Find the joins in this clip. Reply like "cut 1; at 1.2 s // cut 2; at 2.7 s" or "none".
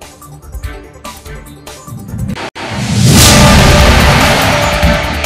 cut 1; at 2.5 s